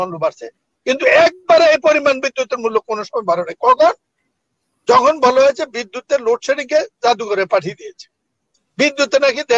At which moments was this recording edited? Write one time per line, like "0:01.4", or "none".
none